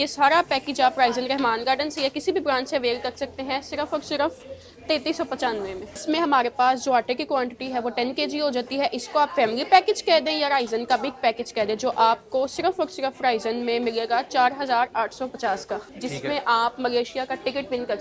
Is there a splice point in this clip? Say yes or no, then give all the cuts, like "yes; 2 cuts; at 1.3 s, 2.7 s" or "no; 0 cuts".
yes; 2 cuts; at 6.0 s, 15.9 s